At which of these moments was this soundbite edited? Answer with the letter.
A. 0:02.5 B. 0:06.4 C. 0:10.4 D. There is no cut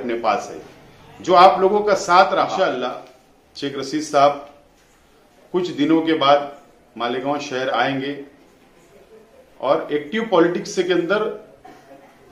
A